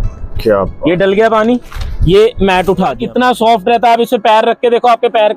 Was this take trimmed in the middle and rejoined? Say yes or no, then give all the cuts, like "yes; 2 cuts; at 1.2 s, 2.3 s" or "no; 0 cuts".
yes; 1 cut; at 3.0 s